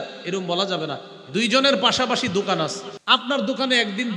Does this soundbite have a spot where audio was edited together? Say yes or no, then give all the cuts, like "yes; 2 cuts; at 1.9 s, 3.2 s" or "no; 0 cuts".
yes; 1 cut; at 2.9 s